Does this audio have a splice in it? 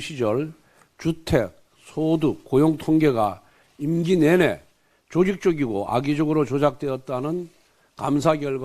no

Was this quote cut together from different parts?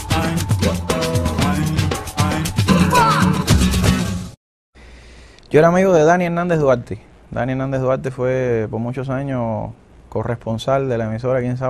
yes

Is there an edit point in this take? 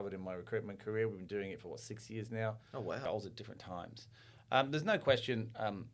yes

